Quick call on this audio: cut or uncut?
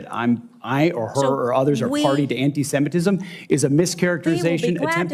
uncut